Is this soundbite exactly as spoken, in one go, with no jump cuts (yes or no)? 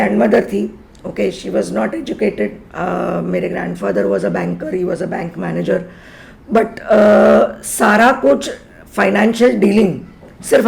yes